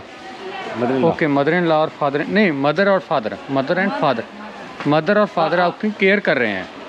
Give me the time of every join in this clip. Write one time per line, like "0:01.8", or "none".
none